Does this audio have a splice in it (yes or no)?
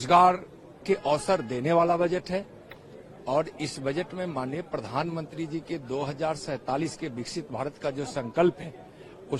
no